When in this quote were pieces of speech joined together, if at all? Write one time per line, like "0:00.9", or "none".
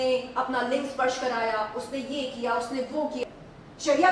0:03.2